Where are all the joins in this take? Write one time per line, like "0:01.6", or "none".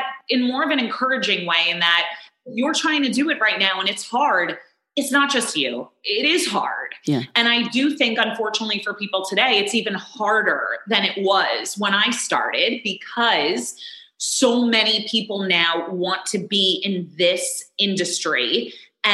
none